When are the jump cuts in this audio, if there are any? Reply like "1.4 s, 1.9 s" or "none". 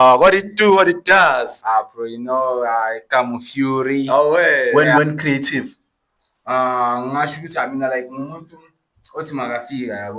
4.7 s